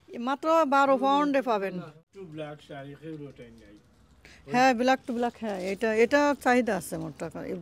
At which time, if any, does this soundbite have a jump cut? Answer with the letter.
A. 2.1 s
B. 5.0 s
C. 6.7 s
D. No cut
A